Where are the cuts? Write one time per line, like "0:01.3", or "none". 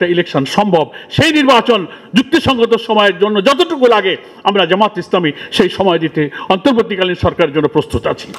none

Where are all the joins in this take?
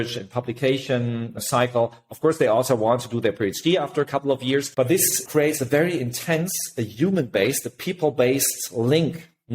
0:01.4
0:05.0

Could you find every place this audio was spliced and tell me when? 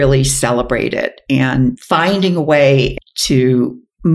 0:02.9

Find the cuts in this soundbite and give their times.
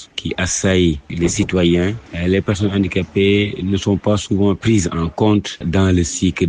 0:01.1
0:02.0
0:05.7

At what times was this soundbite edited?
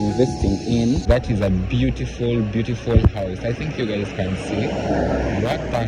0:01.0

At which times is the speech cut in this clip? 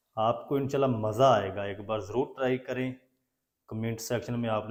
none

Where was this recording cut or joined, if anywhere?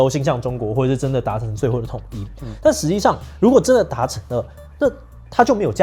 none

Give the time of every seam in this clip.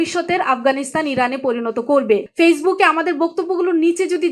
0:02.3

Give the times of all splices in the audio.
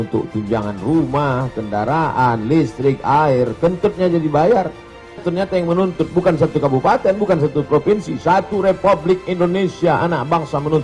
0:05.2

